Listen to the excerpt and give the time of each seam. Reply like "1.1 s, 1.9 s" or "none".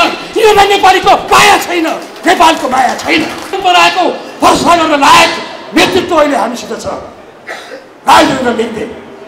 3.6 s